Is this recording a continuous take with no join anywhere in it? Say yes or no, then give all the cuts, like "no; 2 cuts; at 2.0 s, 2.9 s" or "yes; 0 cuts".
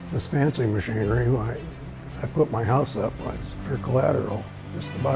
yes; 0 cuts